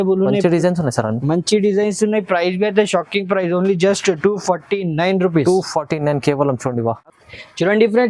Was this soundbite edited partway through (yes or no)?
no